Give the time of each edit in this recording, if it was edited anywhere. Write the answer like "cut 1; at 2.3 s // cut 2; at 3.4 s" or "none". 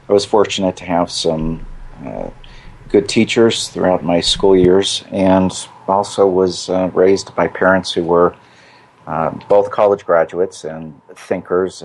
cut 1; at 10.7 s